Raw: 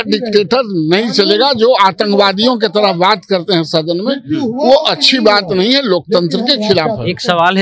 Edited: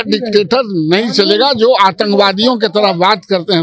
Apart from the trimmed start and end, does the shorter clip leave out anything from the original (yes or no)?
no